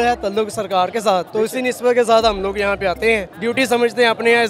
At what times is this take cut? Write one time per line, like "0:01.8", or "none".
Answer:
0:01.3
0:03.3